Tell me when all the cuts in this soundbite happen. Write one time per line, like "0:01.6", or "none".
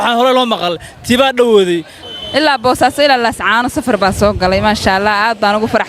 0:02.1